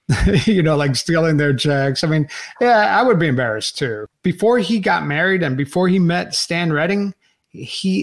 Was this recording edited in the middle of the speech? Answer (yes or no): yes